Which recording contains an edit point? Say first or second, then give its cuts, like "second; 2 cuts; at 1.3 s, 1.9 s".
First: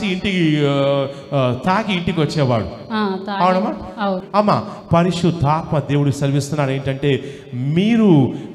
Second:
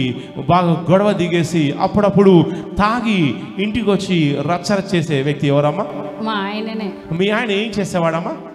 first; 1 cut; at 4.2 s